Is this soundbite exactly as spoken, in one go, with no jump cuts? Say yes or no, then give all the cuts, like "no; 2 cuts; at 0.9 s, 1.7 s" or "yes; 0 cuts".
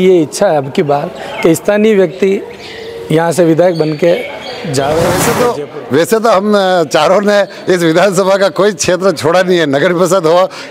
no; 1 cut; at 5.3 s